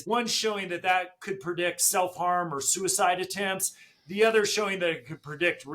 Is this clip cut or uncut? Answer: uncut